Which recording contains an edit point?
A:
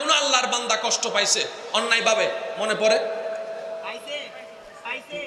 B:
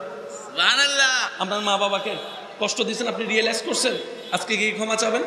B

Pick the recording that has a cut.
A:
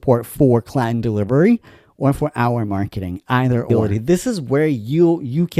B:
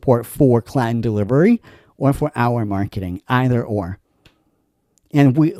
A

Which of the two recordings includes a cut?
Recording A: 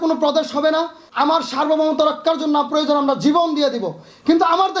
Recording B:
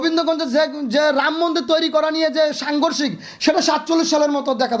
A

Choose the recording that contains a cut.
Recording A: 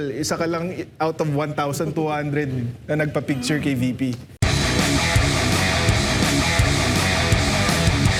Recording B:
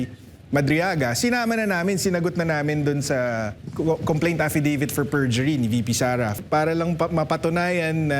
B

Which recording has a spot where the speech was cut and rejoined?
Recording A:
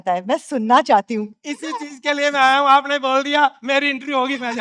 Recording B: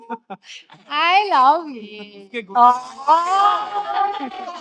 A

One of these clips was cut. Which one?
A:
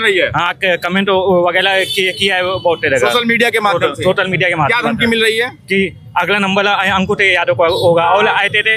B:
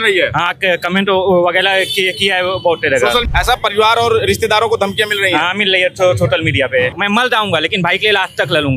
B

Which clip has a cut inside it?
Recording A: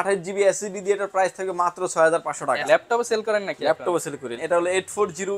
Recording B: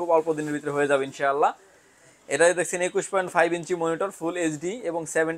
A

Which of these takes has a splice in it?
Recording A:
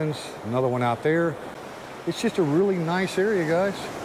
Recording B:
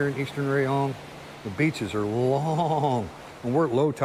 A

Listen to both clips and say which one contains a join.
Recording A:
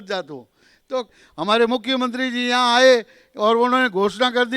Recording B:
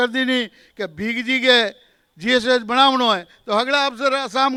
A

